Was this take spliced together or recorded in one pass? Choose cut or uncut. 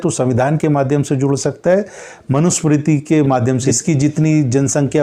cut